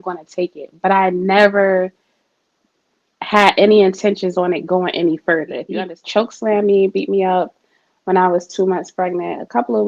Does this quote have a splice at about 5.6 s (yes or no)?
yes